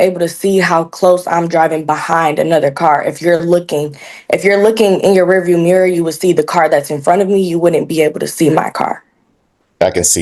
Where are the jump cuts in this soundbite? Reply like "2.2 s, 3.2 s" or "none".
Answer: none